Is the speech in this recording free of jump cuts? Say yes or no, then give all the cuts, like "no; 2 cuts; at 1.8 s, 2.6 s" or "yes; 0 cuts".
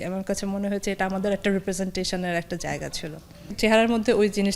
no; 1 cut; at 3.5 s